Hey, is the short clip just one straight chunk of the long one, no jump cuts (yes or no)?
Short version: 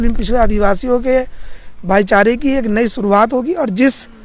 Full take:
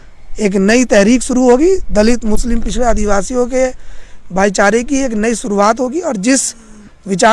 yes